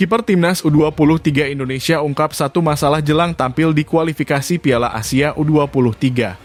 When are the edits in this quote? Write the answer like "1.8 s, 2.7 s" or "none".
none